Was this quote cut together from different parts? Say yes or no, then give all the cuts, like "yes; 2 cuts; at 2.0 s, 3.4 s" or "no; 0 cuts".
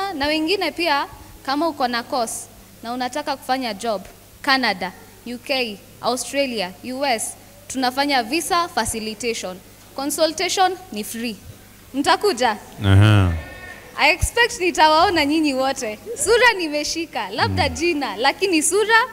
no; 0 cuts